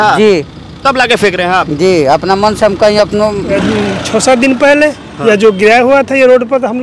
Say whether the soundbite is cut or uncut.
cut